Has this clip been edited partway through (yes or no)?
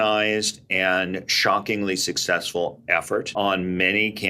yes